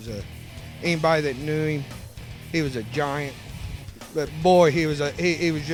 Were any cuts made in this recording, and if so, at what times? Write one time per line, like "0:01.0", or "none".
none